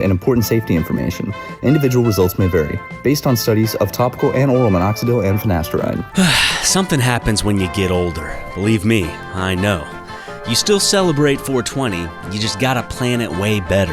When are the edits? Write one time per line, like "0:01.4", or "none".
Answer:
0:06.1